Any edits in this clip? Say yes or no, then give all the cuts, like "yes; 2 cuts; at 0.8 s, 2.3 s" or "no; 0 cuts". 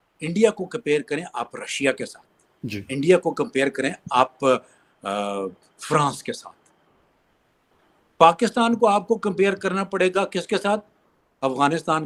no; 0 cuts